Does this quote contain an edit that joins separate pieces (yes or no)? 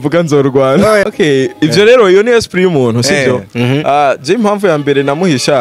yes